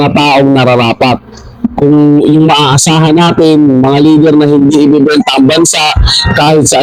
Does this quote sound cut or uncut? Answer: uncut